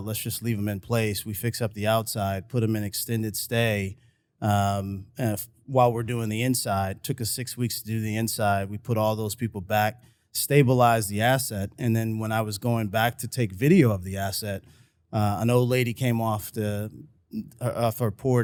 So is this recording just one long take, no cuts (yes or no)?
yes